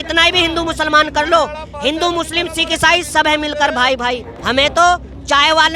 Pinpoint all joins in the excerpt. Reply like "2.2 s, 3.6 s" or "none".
4.3 s

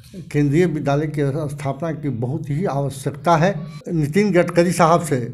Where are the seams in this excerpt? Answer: 3.7 s

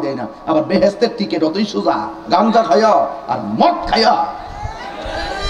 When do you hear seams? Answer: none

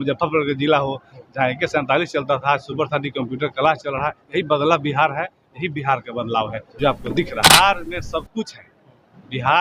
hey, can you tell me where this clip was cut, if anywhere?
7.5 s

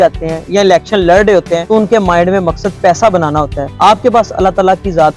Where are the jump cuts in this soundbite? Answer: 1.6 s, 3.6 s

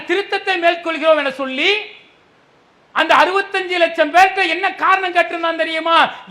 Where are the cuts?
none

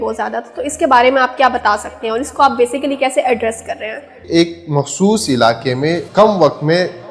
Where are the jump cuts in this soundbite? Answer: 4.3 s, 6.1 s

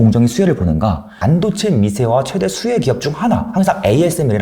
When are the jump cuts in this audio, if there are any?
1.1 s

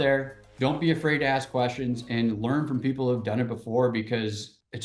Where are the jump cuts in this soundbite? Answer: none

